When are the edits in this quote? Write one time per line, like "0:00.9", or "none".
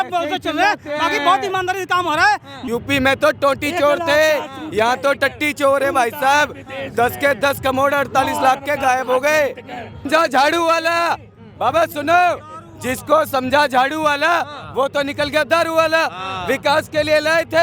0:02.5
0:10.0

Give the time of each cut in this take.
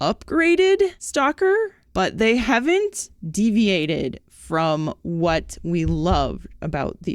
0:01.0
0:01.8

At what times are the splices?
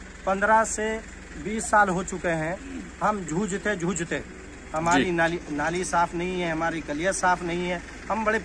none

